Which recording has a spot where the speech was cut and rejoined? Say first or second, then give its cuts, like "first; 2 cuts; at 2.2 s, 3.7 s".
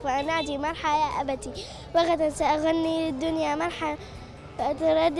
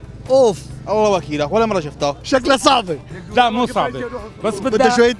second; 1 cut; at 2.2 s